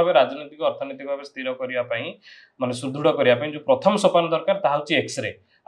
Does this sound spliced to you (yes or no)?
no